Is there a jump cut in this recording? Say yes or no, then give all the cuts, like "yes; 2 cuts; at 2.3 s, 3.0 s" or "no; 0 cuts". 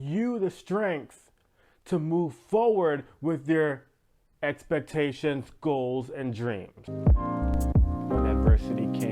yes; 1 cut; at 6.8 s